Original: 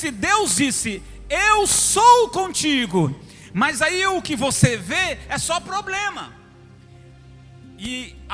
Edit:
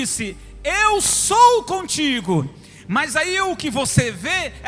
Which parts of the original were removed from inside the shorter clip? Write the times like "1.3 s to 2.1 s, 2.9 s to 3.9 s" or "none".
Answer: none